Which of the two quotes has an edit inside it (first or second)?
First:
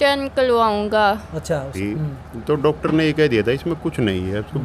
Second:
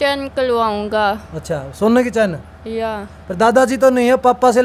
first